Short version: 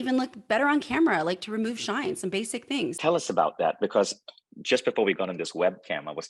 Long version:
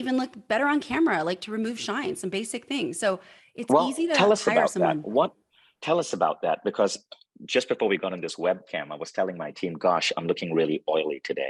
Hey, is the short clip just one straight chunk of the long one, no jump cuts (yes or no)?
no